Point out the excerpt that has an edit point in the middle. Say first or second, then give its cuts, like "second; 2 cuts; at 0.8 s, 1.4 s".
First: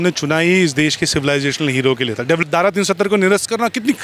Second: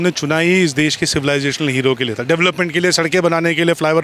first; 1 cut; at 2.4 s